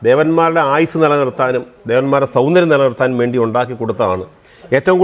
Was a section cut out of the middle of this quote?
no; 0 cuts

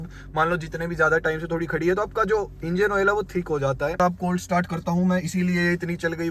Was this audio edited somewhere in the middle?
yes; 1 cut; at 4.0 s

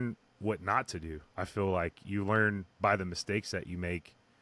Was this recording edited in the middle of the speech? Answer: no; 0 cuts

